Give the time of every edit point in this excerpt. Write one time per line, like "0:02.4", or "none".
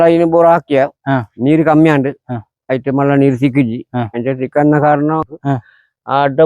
0:05.3